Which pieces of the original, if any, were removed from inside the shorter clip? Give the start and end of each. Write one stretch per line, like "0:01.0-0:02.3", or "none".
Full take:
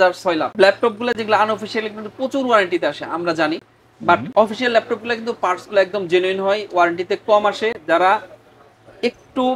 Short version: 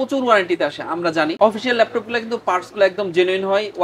0:03.6-0:04.3